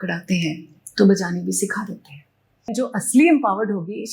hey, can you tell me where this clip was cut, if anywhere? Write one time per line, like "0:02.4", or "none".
0:02.7